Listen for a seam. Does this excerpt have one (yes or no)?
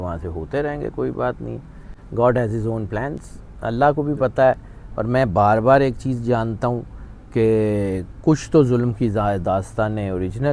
no